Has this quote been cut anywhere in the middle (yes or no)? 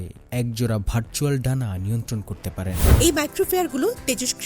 yes